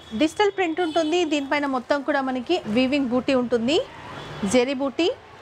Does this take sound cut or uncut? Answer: uncut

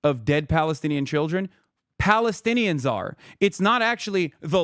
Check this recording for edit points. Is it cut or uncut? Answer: uncut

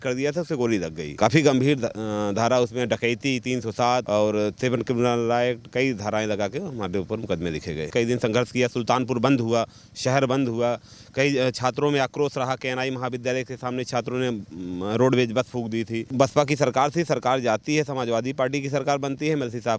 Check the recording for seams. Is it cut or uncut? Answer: cut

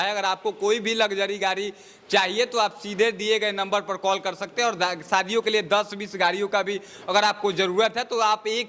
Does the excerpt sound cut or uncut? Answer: uncut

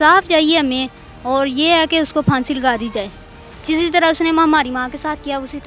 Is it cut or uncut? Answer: uncut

